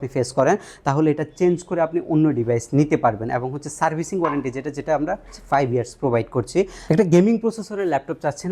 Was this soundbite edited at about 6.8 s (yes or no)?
yes